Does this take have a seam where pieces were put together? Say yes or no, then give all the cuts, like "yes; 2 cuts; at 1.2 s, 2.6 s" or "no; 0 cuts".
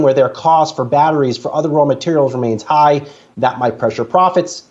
no; 0 cuts